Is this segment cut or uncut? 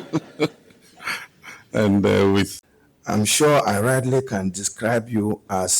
cut